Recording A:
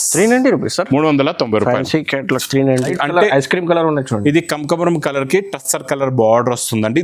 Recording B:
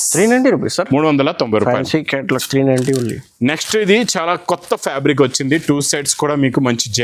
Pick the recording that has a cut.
A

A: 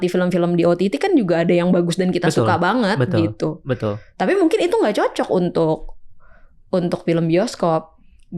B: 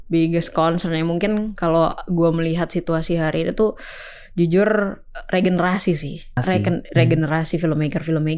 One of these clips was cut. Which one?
B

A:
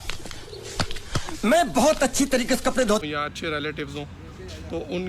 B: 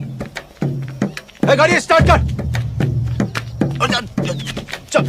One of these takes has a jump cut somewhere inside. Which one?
A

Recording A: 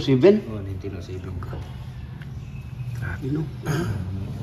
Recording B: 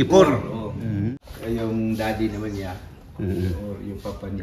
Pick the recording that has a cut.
B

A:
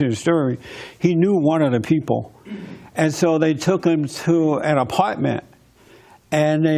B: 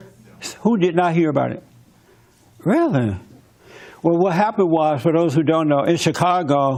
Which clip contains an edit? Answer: A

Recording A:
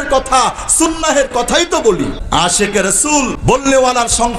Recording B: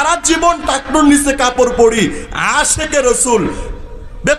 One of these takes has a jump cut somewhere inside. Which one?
A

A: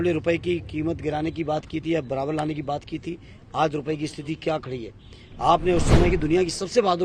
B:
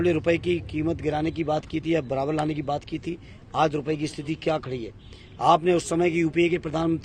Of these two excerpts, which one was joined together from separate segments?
A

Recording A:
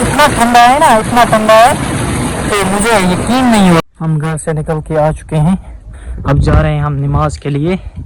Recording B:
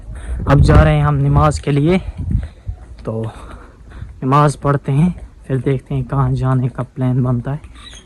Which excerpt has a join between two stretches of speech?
A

